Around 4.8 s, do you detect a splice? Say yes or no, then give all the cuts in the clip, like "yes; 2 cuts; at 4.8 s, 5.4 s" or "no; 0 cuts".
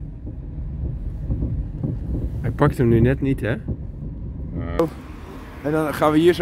yes; 1 cut; at 4.8 s